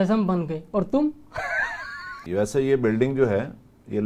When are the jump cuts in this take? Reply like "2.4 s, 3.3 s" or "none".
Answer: 2.2 s